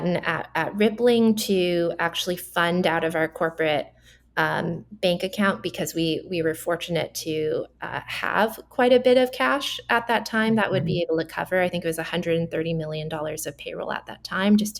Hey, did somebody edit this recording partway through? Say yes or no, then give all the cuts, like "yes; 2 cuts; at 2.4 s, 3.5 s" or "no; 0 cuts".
no; 0 cuts